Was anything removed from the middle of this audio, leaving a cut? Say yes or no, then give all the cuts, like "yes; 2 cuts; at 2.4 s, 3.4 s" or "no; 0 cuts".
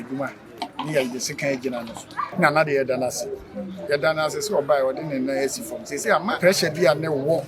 yes; 2 cuts; at 2.3 s, 6.4 s